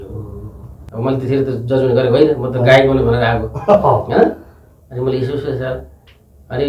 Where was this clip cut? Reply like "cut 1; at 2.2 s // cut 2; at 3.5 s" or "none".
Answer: cut 1; at 1.0 s